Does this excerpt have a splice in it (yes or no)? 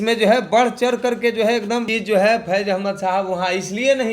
yes